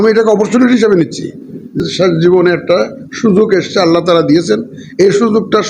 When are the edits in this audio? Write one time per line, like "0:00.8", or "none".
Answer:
0:01.8